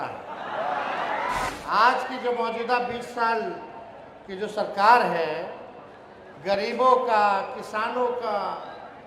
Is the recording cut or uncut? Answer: cut